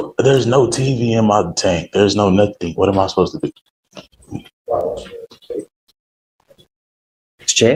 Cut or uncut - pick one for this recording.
uncut